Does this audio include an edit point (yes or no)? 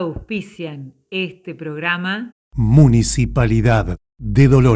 yes